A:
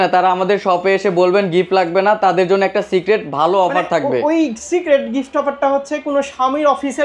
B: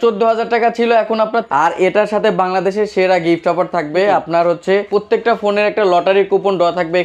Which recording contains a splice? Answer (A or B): B